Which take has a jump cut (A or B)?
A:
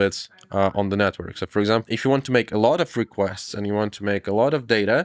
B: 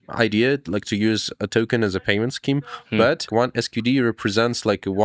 B